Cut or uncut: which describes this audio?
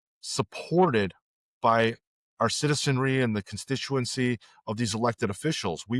uncut